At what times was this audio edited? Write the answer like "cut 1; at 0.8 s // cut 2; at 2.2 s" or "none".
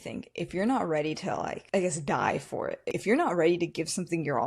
cut 1; at 1.6 s // cut 2; at 2.9 s